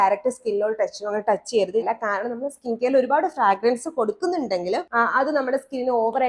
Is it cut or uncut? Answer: cut